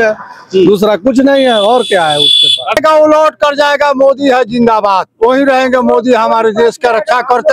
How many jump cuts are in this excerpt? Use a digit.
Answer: 1